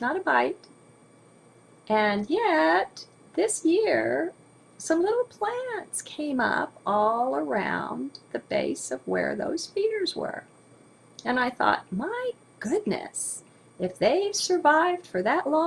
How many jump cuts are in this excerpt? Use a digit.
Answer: 1